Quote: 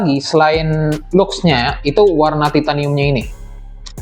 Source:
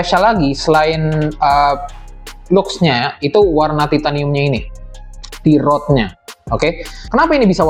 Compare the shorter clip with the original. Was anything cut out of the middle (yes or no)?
yes